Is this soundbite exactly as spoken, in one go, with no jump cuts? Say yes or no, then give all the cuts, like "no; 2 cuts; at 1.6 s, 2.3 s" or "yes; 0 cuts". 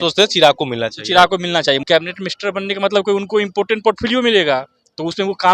no; 1 cut; at 1.8 s